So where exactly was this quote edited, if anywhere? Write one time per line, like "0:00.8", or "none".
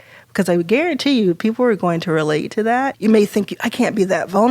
0:02.9